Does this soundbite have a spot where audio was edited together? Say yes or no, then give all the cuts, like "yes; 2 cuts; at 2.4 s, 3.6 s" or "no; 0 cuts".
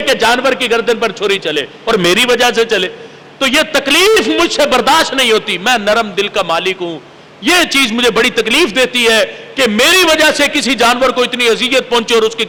no; 0 cuts